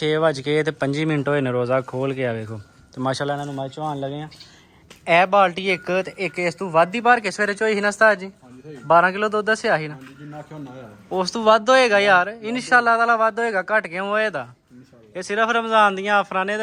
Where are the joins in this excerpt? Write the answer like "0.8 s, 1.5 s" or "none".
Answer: none